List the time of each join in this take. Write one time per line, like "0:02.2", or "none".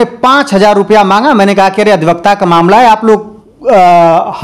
none